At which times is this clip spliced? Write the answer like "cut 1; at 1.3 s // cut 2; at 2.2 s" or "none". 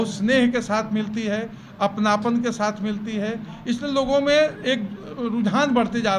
none

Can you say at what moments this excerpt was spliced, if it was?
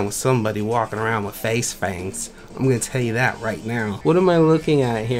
cut 1; at 4.0 s

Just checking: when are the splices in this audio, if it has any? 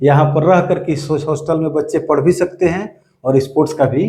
none

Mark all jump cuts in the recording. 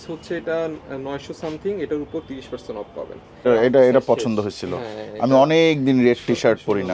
cut 1; at 3.5 s

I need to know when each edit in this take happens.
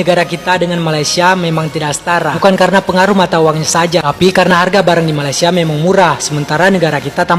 none

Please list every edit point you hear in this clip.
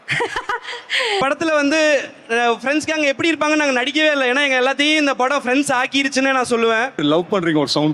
cut 1; at 1.2 s // cut 2; at 7.0 s

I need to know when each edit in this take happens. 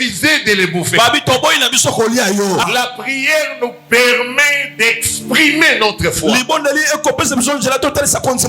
cut 1; at 2.7 s

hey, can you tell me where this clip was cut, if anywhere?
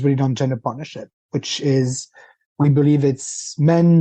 none

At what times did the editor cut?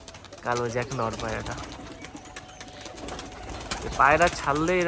none

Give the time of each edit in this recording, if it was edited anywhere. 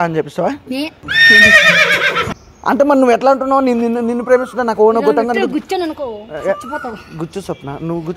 cut 1; at 2.4 s

